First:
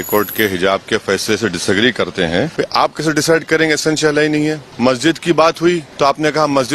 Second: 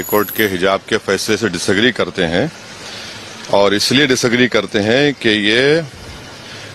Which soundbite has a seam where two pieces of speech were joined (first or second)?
first